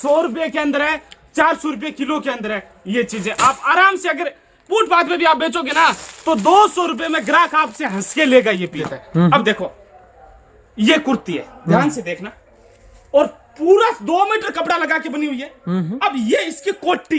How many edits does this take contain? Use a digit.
1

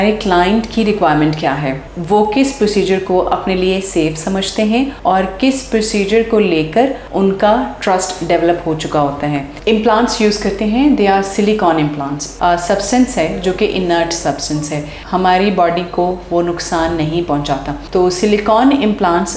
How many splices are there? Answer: 3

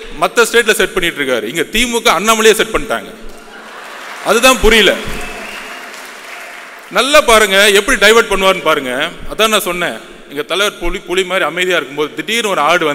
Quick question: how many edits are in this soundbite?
0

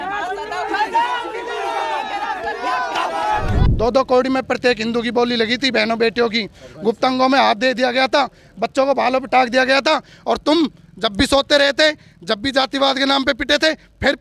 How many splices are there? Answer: 1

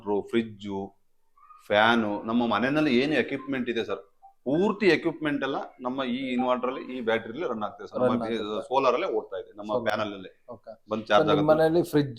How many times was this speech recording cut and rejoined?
0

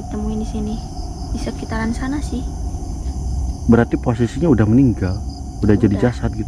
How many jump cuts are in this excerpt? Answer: 0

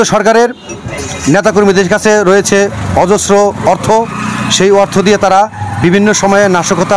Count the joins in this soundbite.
0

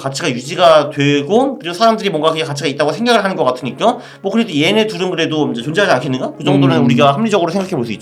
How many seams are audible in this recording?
0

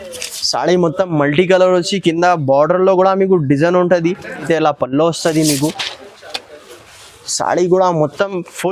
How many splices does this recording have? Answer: 1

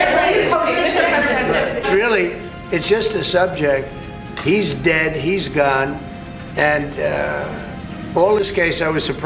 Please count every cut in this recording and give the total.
0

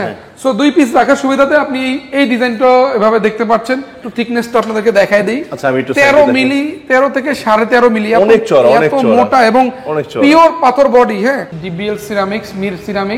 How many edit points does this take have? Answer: 2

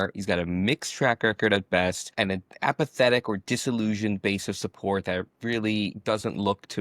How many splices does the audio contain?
2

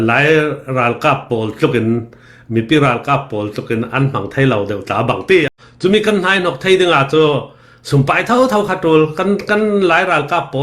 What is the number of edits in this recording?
1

